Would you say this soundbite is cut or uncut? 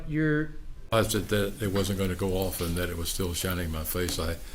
cut